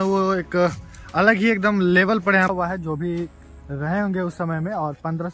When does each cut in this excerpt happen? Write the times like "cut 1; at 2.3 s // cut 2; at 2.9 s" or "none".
cut 1; at 2.5 s